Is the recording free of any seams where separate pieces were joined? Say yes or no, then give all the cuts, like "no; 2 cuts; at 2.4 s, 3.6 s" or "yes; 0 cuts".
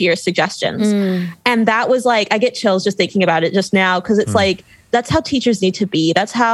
no; 1 cut; at 4.8 s